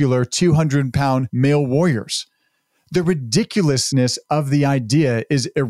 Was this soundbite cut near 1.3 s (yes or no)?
yes